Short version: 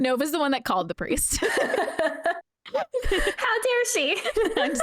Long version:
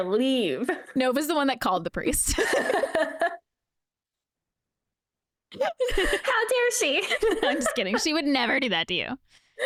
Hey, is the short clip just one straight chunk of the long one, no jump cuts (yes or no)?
no